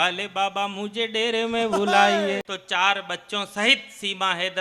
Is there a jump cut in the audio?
yes; 1 cut; at 2.5 s

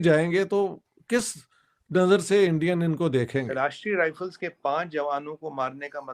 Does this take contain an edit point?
yes; 1 cut; at 3.5 s

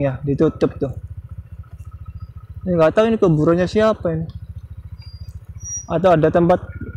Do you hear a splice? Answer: no; 0 cuts

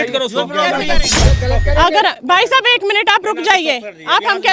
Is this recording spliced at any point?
yes; 1 cut; at 1.2 s

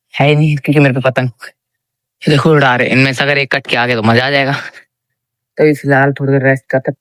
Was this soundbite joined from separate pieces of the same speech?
no; 0 cuts

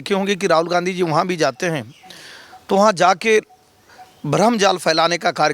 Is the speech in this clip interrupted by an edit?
no; 0 cuts

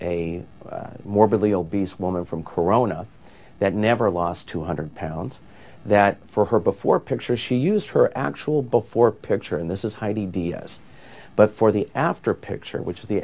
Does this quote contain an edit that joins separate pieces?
no; 0 cuts

